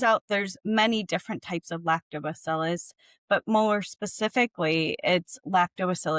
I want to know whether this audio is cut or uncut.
uncut